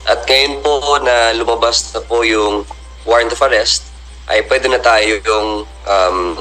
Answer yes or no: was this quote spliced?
no